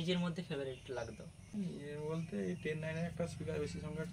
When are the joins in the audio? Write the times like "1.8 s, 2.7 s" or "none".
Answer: 1.4 s